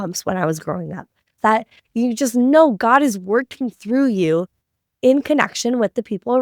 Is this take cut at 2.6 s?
no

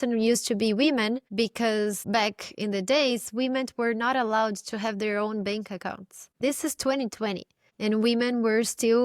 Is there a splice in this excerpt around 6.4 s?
yes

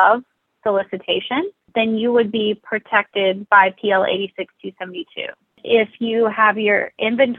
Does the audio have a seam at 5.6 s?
yes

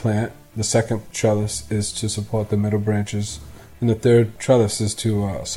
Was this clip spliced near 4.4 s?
yes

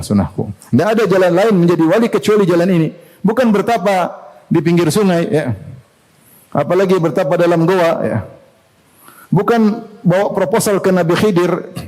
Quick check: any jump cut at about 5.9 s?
no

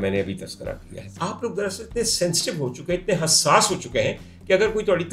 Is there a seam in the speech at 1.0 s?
yes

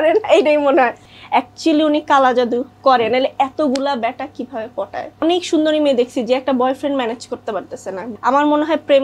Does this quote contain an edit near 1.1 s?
yes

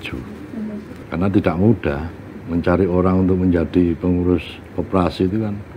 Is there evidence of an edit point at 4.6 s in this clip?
no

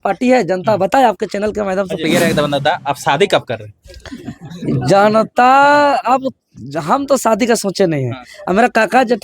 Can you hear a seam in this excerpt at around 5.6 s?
no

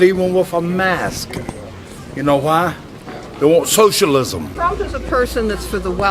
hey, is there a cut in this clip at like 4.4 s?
yes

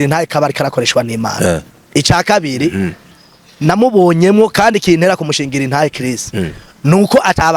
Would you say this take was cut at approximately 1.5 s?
yes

